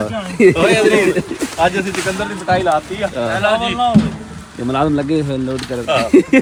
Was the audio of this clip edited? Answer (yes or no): no